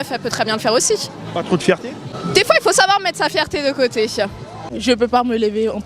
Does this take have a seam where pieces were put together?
yes; 2 cuts; at 2.1 s, 4.8 s

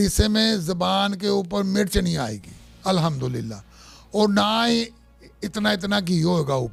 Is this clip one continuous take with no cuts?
yes; 0 cuts

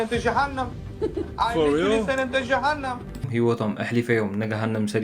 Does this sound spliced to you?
yes; 1 cut; at 3.3 s

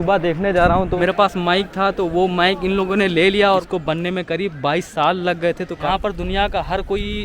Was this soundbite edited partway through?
yes; 3 cuts; at 0.9 s, 3.6 s, 5.8 s

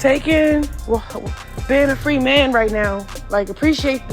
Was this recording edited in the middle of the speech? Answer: yes; 1 cut; at 3.1 s

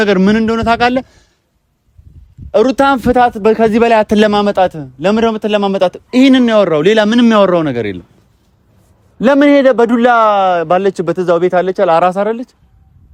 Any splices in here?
no; 0 cuts

